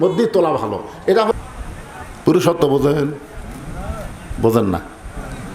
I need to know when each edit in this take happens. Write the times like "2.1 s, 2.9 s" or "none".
1.3 s